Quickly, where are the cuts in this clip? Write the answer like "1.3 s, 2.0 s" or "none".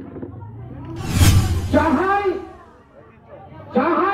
1.4 s